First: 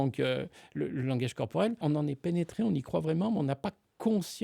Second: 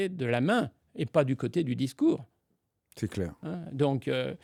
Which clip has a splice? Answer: first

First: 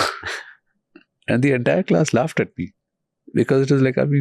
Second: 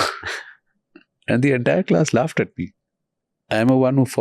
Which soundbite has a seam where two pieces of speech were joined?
second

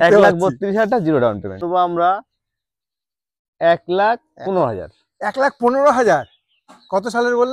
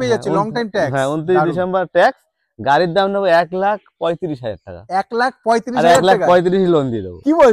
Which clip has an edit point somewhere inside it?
first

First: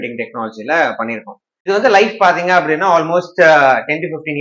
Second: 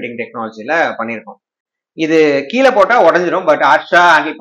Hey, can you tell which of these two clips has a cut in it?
first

